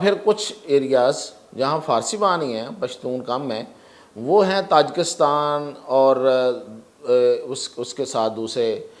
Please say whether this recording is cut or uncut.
uncut